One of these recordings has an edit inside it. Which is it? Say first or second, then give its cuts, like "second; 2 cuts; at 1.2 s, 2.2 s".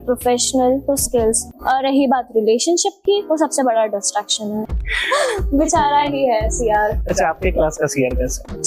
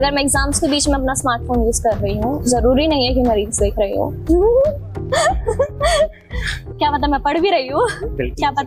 first; 2 cuts; at 1.5 s, 4.7 s